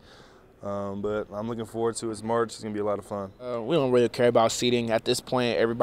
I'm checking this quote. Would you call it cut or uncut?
cut